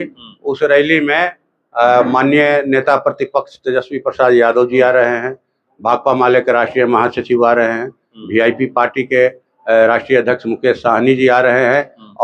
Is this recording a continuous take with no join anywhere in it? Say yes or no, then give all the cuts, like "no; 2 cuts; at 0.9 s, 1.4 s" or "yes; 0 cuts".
yes; 0 cuts